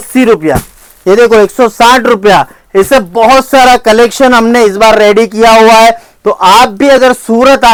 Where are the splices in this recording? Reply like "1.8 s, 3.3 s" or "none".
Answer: none